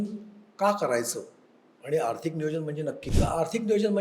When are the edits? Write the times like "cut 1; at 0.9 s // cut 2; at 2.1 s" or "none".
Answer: cut 1; at 3.0 s